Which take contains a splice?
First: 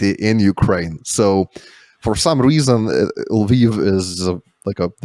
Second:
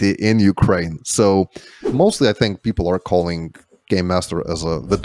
second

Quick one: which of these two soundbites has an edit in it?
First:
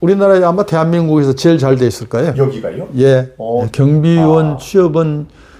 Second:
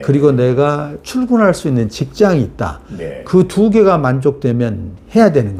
first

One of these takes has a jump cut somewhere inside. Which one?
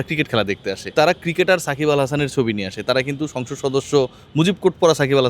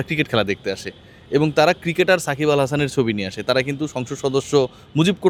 first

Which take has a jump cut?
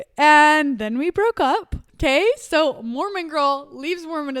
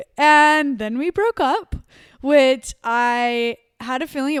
first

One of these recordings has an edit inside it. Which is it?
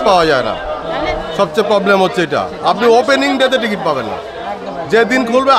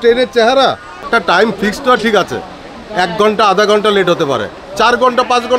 second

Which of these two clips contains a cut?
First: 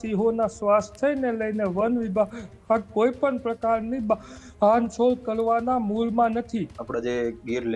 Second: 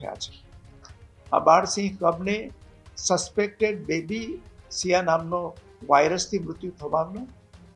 first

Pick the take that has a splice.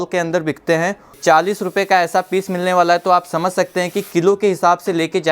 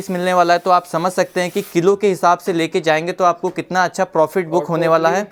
first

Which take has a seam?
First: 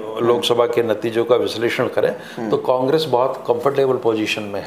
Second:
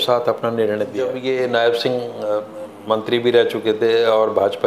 second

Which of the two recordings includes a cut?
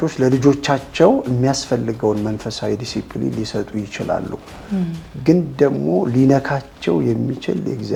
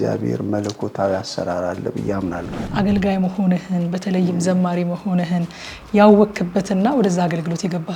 second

